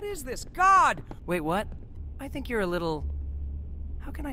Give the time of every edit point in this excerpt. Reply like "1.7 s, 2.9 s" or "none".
1.1 s, 1.9 s